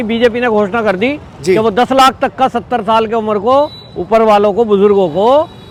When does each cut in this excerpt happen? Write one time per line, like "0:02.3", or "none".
none